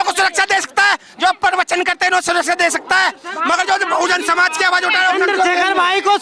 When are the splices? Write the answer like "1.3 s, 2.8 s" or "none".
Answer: none

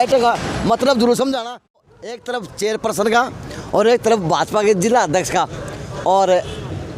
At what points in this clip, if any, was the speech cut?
1.8 s

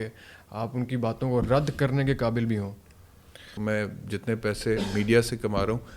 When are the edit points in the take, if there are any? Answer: 3.5 s

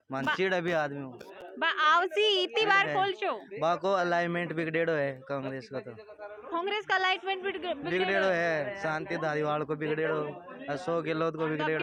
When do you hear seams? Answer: none

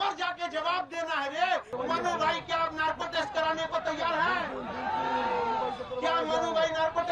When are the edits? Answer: 1.7 s

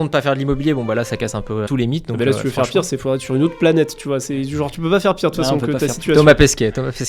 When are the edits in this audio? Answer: none

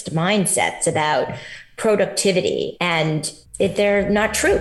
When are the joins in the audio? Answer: 2.9 s

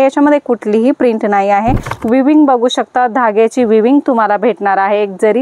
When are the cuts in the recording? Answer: 1.9 s

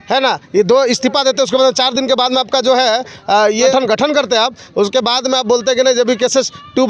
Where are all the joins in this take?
3.7 s

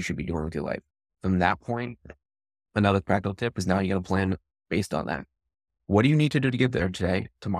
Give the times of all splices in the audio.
none

